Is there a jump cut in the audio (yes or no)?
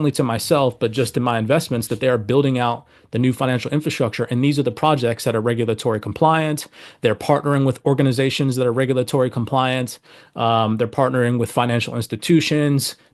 no